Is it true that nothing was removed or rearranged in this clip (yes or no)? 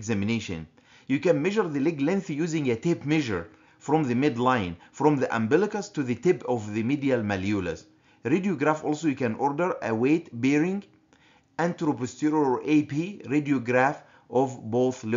yes